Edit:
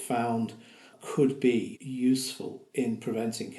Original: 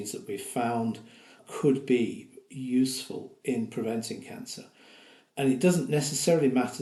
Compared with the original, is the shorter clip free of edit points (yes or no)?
no